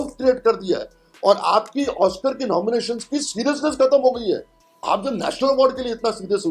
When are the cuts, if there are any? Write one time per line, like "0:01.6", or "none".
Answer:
0:04.6